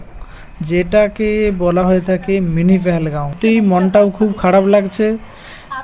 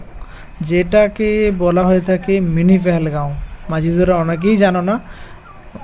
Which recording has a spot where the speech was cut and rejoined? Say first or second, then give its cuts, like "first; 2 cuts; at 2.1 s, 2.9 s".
first; 1 cut; at 3.3 s